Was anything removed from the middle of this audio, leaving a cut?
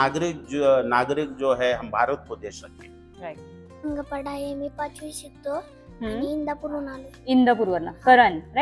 yes; 1 cut; at 3.8 s

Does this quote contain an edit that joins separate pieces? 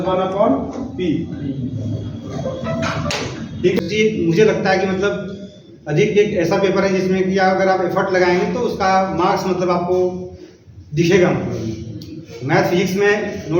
yes; 1 cut; at 3.8 s

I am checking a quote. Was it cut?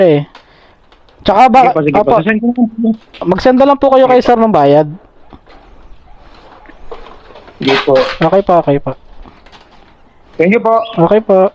no; 0 cuts

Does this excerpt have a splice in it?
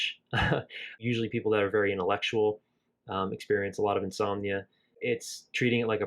yes; 2 cuts; at 1.0 s, 5.0 s

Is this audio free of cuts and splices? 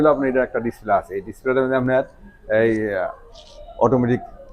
yes; 0 cuts

